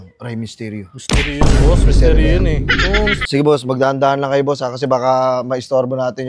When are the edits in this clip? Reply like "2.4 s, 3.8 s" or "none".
3.2 s